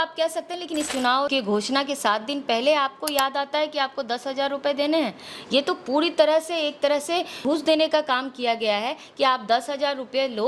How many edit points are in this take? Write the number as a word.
two